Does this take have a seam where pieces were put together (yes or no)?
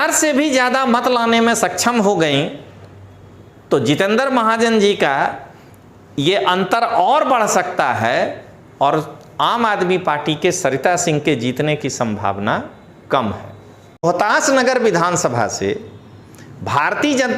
yes